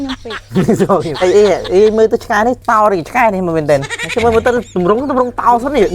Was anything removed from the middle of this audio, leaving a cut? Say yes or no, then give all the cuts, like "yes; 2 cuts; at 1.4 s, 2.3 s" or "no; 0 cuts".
yes; 3 cuts; at 1.1 s, 2.6 s, 4.0 s